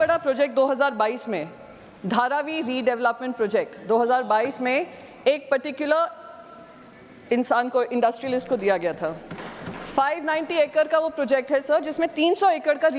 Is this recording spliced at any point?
no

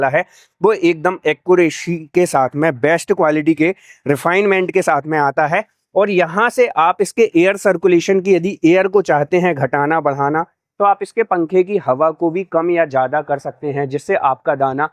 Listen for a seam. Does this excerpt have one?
no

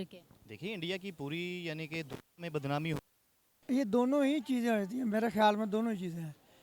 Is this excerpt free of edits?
no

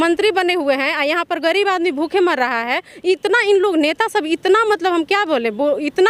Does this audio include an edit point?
no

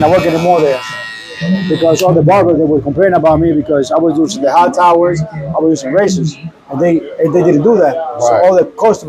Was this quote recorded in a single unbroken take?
yes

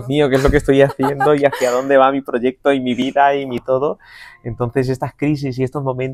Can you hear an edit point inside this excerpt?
no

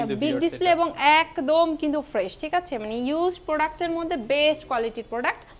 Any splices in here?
no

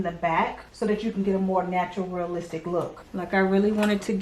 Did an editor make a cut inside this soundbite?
yes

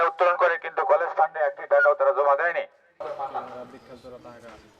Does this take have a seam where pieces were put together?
yes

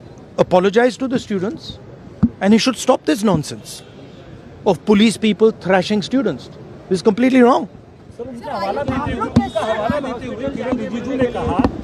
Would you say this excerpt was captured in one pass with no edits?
yes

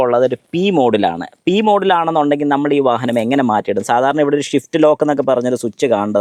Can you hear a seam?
no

